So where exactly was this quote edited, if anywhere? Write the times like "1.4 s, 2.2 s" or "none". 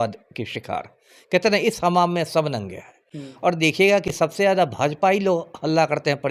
none